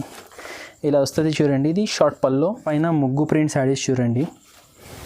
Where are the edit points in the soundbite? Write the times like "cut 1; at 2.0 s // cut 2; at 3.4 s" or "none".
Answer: cut 1; at 2.7 s